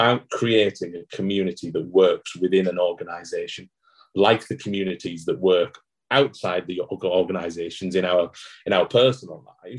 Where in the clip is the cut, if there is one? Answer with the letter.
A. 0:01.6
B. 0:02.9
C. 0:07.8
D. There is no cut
D